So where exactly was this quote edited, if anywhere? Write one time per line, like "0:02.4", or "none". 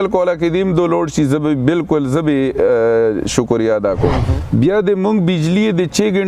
0:04.3